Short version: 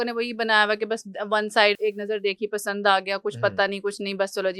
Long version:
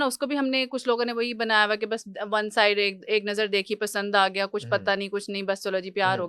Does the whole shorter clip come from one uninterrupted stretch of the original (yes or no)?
no